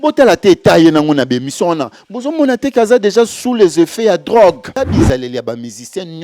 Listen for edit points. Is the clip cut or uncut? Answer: cut